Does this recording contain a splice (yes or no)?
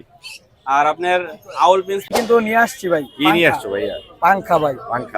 yes